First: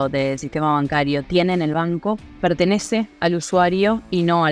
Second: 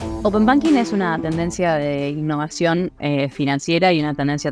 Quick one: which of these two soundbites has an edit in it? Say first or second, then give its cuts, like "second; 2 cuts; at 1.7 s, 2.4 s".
first; 1 cut; at 2.3 s